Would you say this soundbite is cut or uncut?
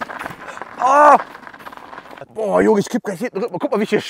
cut